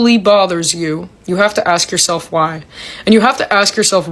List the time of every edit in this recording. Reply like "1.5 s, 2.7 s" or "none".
none